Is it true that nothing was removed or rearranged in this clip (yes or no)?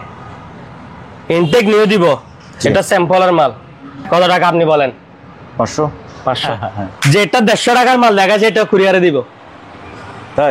no